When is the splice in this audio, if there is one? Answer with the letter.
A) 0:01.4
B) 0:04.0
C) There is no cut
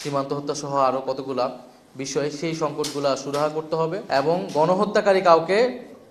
B